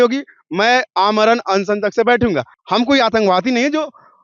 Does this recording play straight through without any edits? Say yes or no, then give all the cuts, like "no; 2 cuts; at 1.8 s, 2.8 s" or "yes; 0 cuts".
no; 1 cut; at 2.5 s